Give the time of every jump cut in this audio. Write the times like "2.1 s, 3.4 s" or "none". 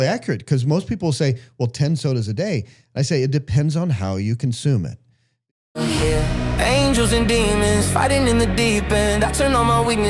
5.3 s